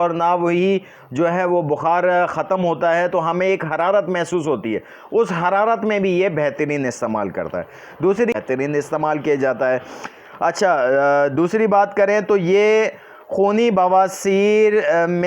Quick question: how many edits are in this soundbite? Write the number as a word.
one